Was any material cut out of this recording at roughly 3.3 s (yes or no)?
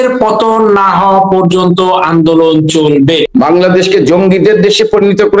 yes